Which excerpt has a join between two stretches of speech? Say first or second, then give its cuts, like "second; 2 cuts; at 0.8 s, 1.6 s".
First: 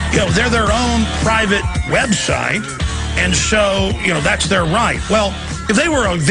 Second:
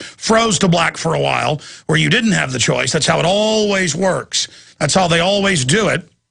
second; 1 cut; at 2.8 s